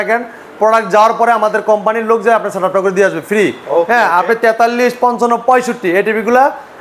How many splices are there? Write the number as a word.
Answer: zero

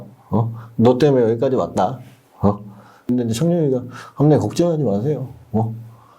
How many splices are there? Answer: one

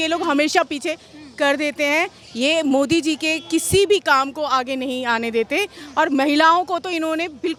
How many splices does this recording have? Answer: zero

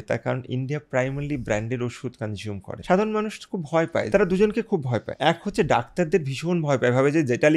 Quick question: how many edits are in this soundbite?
three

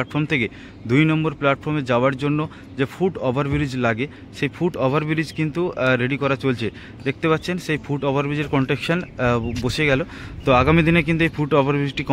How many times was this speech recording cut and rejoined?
zero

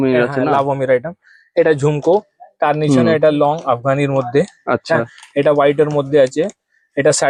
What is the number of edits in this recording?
zero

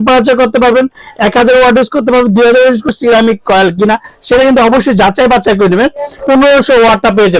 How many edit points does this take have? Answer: two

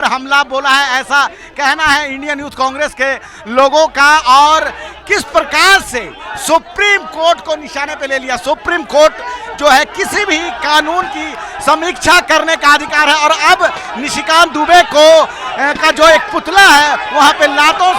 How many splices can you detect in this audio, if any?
zero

